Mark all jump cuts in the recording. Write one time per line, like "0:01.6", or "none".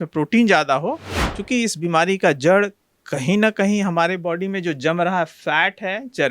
0:01.2